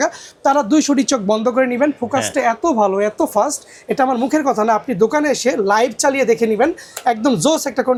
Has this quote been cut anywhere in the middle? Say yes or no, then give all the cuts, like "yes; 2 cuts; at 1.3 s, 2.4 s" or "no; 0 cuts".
no; 0 cuts